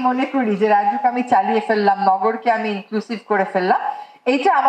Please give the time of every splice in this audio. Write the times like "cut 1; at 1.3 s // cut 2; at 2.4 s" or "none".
none